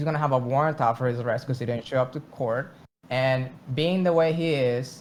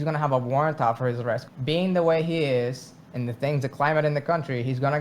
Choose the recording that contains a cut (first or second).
second